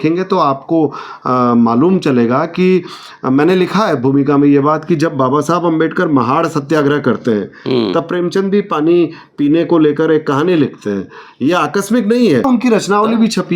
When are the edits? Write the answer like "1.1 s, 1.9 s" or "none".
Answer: 12.4 s